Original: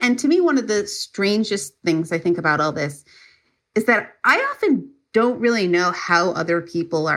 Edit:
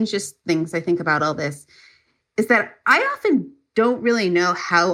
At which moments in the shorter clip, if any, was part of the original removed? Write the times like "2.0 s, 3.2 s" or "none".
none